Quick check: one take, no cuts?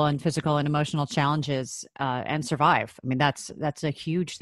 yes; 0 cuts

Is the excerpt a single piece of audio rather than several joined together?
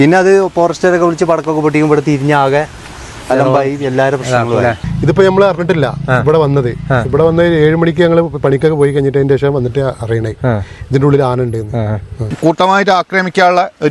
no; 2 cuts; at 4.9 s, 12.3 s

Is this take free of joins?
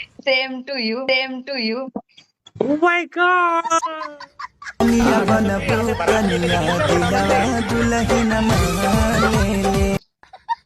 yes; 0 cuts

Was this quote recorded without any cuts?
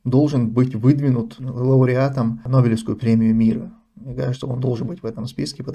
no; 1 cut; at 2.4 s

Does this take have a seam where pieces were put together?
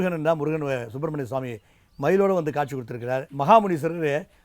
yes; 1 cut; at 3.3 s

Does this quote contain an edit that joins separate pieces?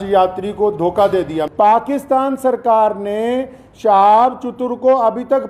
yes; 1 cut; at 1.5 s

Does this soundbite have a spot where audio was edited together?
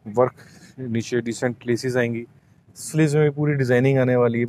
no; 0 cuts

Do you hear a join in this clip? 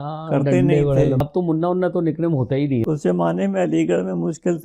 yes; 2 cuts; at 1.2 s, 2.8 s

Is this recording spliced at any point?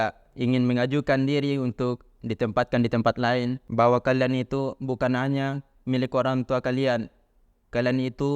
yes; 1 cut; at 3.6 s

